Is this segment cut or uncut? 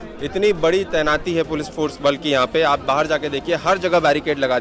uncut